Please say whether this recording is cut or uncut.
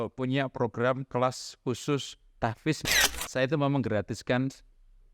cut